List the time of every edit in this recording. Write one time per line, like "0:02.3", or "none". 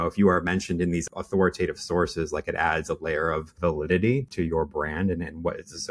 0:01.1
0:04.3